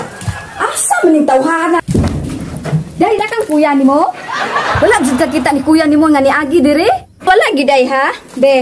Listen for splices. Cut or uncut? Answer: cut